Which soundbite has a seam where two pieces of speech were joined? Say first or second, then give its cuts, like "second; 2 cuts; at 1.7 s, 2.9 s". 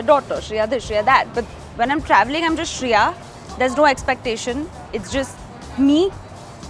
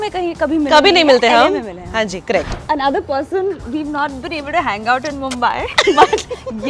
second; 1 cut; at 2.5 s